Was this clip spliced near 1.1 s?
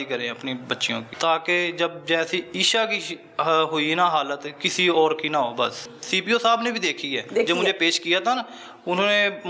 yes; 2 cuts; at 1.1 s, 5.9 s

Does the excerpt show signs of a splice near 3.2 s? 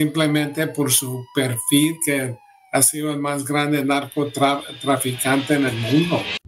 no; 0 cuts

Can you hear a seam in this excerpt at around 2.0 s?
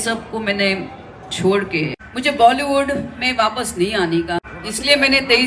yes; 2 cuts; at 2.0 s, 4.5 s

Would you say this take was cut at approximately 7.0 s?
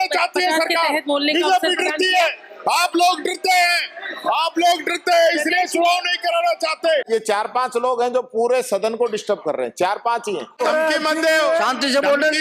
yes; 2 cuts; at 7.0 s, 10.6 s

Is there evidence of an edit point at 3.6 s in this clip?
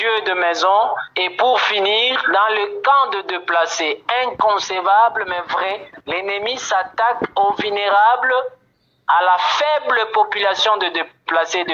no; 0 cuts

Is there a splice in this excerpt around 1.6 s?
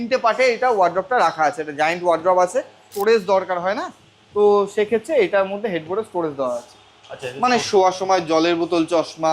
no; 1 cut; at 2.9 s

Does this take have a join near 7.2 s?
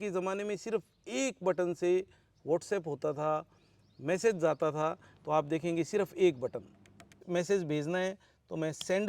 yes; 1 cut; at 7.2 s

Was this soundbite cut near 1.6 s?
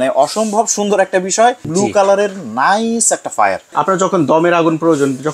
yes; 2 cuts; at 1.6 s, 3.7 s

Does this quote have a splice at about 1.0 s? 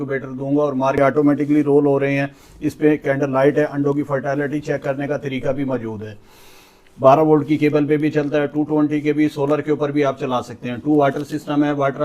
yes; 1 cut; at 1.0 s

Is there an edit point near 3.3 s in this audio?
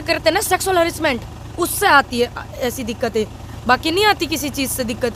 no; 0 cuts

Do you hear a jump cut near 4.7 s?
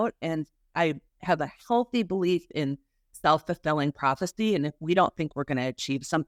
no; 0 cuts

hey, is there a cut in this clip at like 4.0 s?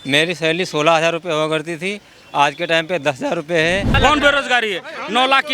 yes; 1 cut; at 4.0 s

